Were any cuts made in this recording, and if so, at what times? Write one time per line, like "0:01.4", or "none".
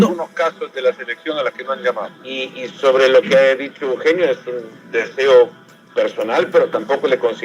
0:02.1

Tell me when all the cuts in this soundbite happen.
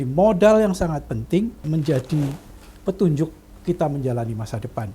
0:01.6

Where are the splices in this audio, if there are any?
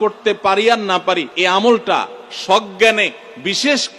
0:01.3

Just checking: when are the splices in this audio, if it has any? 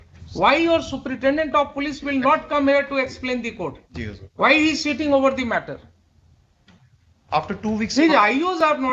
none

